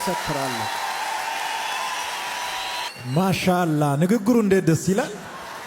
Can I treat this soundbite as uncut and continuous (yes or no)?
no